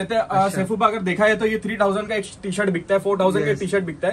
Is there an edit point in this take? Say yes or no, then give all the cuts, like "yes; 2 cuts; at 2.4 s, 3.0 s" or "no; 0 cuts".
no; 0 cuts